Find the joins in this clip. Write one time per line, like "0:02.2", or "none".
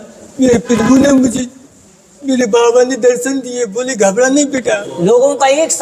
0:04.9